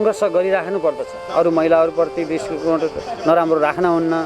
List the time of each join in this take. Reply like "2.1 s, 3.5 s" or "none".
1.2 s